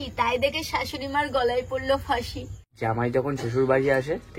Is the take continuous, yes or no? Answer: no